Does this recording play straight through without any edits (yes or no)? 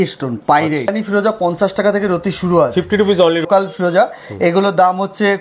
no